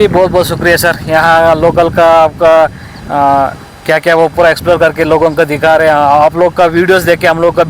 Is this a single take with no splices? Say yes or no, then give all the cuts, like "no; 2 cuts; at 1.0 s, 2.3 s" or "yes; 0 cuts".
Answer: yes; 0 cuts